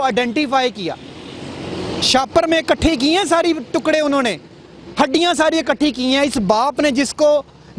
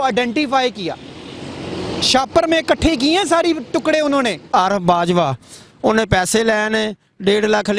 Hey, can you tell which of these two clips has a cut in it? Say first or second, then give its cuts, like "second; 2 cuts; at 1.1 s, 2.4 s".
second; 1 cut; at 4.4 s